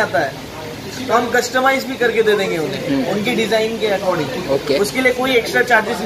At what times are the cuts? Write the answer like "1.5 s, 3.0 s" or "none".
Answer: none